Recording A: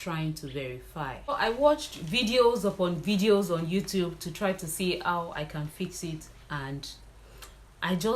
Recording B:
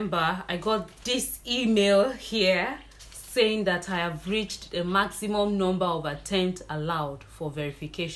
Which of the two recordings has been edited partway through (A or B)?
A